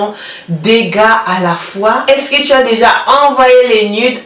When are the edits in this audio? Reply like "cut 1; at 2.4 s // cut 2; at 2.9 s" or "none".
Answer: cut 1; at 2.1 s